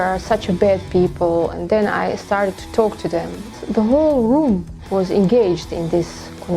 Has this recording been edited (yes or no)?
yes